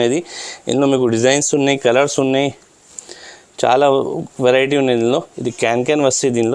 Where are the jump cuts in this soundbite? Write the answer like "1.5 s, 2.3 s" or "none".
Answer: none